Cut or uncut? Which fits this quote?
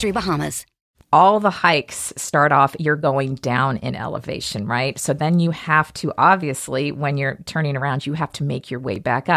cut